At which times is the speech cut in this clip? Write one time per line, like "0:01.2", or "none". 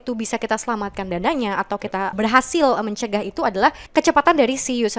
0:02.1
0:03.8